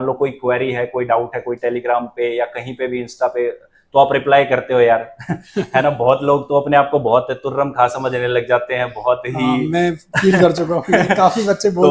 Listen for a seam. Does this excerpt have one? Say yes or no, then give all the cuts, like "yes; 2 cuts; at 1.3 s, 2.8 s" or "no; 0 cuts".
no; 0 cuts